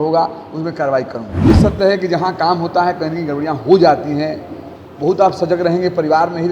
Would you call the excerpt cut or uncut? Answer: cut